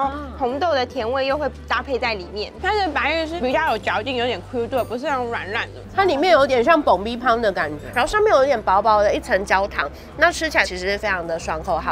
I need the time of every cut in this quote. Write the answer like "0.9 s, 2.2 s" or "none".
2.5 s, 3.4 s, 5.9 s, 7.8 s